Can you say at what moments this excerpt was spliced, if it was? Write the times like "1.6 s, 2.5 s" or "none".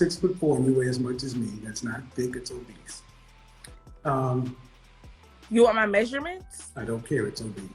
none